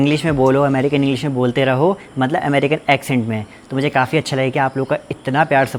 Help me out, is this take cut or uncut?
uncut